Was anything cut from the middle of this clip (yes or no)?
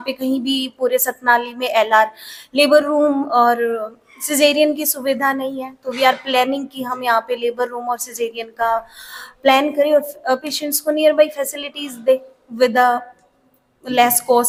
no